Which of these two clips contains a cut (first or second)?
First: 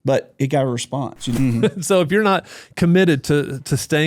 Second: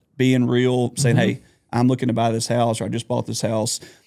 first